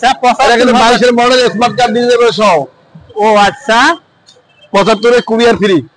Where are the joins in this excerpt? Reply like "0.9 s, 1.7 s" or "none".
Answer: none